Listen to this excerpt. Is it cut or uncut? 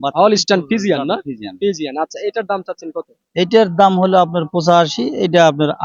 uncut